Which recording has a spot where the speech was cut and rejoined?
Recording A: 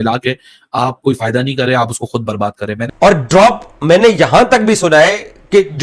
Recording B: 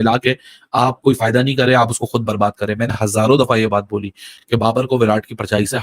A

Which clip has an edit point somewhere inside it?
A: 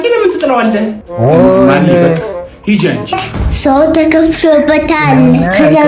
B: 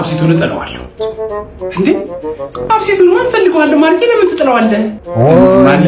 A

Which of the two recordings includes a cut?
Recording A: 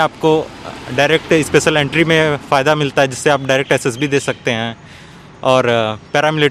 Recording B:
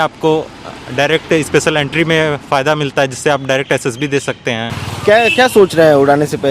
B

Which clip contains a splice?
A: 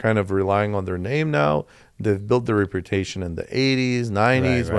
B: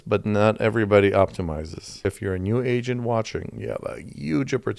B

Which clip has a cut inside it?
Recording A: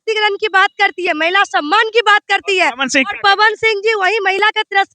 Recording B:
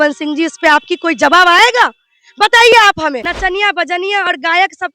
B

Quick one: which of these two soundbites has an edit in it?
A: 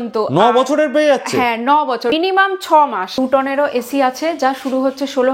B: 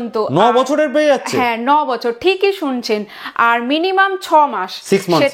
A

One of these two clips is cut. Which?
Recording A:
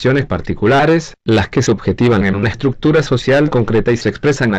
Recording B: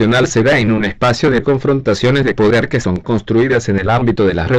B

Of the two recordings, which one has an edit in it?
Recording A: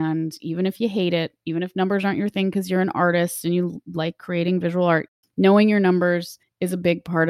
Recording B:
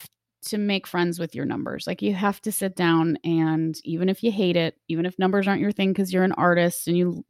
A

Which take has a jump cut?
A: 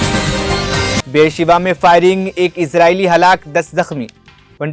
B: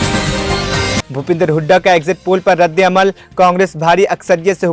B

